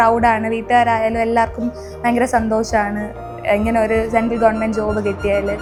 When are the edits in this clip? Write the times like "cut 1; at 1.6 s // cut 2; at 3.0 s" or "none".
none